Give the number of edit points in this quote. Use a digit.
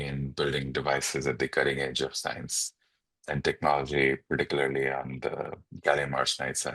0